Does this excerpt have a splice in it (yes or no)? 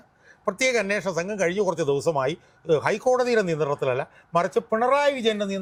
no